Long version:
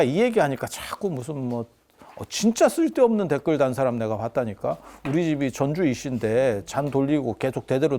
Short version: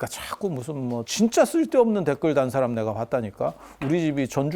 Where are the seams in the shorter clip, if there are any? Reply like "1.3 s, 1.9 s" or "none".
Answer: 1.1 s